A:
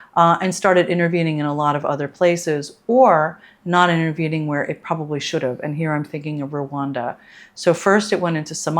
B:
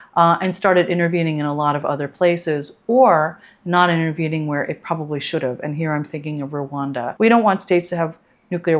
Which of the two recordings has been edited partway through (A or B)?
B